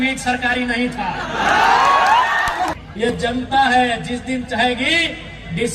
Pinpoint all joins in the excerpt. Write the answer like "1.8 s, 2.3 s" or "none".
2.7 s